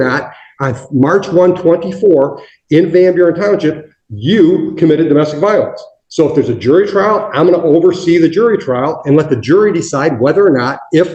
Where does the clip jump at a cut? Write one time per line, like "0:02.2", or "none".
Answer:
none